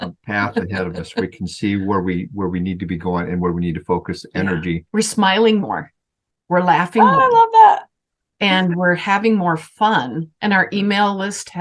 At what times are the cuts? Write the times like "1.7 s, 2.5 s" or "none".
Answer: 4.8 s, 10.3 s